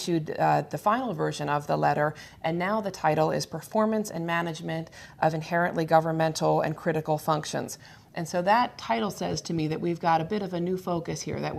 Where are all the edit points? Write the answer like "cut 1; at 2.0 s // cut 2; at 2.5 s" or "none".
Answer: cut 1; at 3.9 s

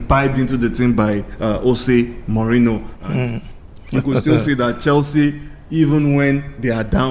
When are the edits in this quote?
none

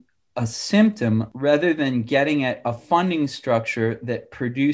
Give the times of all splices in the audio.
cut 1; at 1.3 s

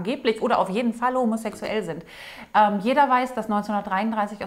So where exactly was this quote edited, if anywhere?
none

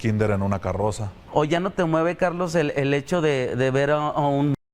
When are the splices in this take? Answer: cut 1; at 1.1 s

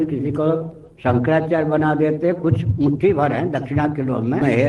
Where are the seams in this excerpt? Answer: none

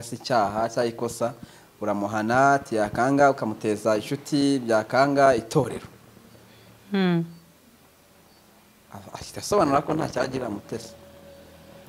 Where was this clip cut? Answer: none

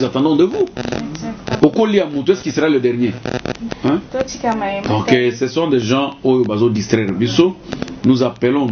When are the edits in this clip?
cut 1; at 3.6 s

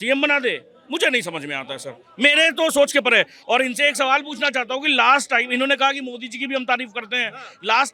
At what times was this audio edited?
none

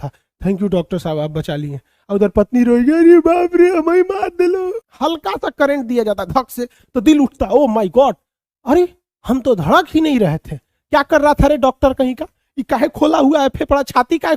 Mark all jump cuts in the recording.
cut 1; at 4.8 s

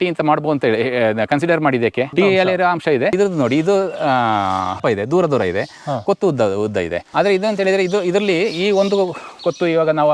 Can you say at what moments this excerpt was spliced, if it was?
cut 1; at 2.1 s // cut 2; at 3.1 s // cut 3; at 4.8 s // cut 4; at 7.1 s

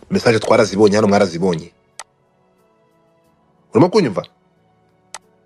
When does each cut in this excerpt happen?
none

